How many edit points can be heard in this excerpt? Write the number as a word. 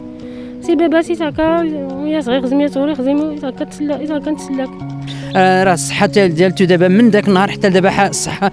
one